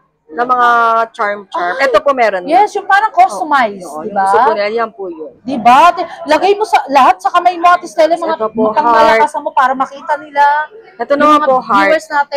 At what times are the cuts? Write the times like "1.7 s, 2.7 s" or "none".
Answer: none